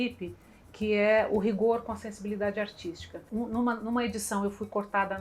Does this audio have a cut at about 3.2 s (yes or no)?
yes